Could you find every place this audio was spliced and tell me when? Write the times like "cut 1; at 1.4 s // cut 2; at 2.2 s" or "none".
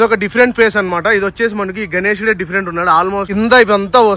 cut 1; at 3.2 s